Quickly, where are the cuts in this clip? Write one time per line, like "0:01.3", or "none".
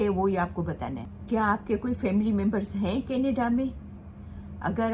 none